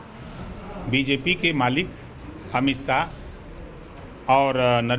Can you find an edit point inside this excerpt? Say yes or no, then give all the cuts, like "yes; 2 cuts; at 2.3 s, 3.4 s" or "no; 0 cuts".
no; 0 cuts